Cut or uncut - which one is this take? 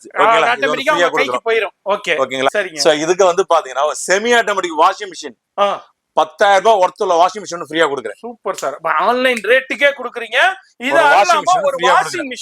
cut